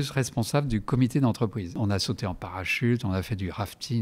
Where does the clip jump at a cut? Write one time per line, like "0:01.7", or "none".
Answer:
0:01.8